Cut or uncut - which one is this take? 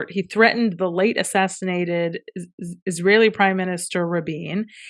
uncut